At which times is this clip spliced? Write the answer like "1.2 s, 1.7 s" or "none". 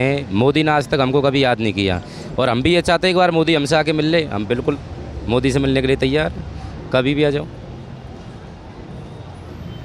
none